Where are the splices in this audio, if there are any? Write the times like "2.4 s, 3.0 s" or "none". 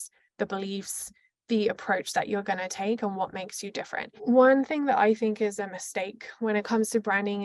4.1 s